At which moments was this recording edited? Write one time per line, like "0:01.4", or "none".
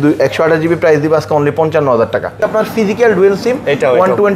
0:02.4